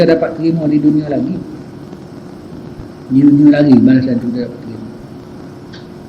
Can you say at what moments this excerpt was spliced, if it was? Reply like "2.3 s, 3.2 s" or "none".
none